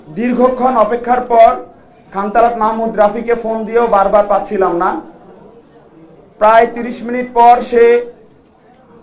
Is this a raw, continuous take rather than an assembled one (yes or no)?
yes